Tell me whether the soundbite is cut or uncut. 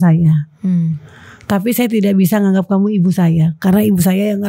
uncut